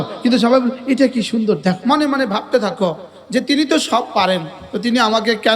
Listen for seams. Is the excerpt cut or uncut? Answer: cut